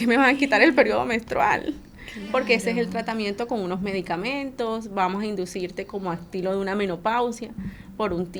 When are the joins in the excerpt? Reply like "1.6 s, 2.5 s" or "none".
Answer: none